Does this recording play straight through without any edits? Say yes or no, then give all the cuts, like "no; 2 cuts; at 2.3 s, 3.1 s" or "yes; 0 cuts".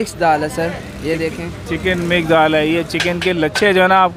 yes; 0 cuts